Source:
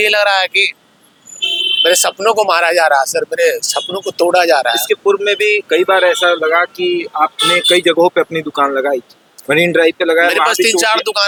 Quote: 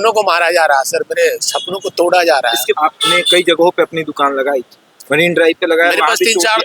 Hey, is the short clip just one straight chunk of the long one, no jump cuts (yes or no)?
no